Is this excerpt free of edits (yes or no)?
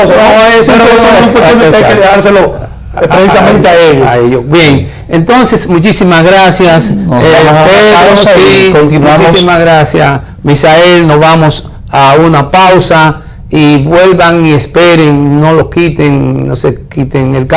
no